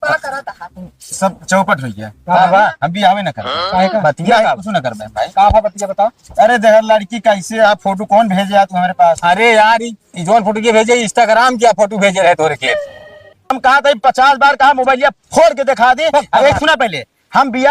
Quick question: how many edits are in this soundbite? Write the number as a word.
one